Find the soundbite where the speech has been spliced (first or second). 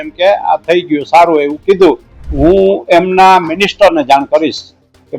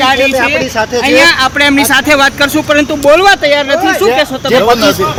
first